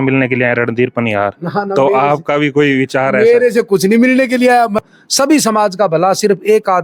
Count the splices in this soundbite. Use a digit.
1